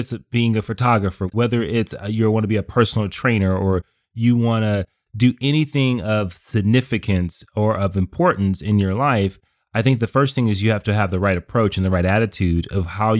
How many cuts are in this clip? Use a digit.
1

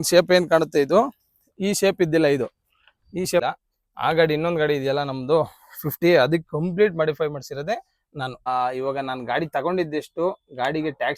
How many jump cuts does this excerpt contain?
2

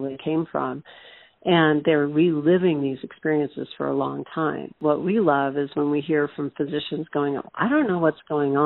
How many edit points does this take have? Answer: 1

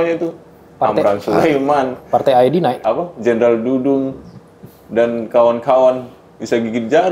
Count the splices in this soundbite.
1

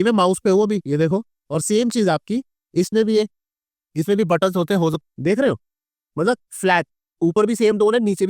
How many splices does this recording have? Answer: 1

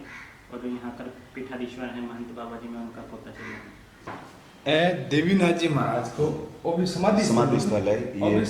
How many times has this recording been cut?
1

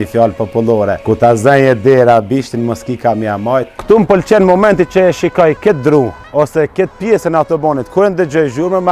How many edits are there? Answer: 2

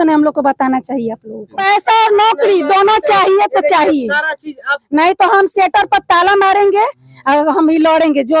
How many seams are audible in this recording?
1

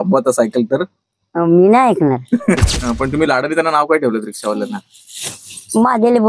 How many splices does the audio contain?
1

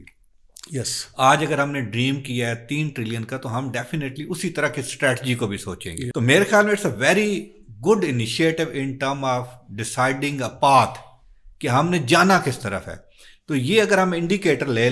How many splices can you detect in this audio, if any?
1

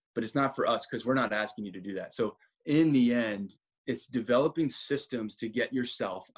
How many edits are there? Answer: 2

